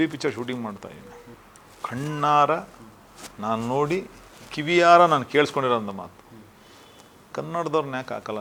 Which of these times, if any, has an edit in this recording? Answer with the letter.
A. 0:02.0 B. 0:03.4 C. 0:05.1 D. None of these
D